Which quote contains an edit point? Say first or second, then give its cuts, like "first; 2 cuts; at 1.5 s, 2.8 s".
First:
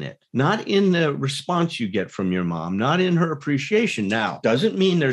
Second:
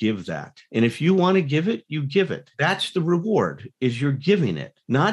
second; 1 cut; at 2.5 s